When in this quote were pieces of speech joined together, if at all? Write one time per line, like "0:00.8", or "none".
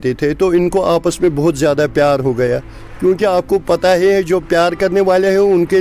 none